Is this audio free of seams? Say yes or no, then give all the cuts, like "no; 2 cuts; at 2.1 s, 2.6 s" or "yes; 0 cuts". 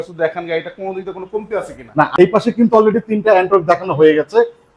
no; 1 cut; at 2.1 s